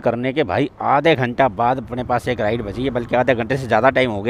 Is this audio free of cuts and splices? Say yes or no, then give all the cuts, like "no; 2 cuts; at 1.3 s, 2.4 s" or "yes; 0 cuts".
yes; 0 cuts